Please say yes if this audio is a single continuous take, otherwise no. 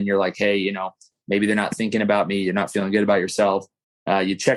yes